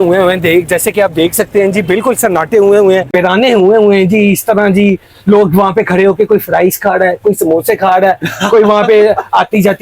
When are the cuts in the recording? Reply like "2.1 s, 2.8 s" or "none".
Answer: 3.1 s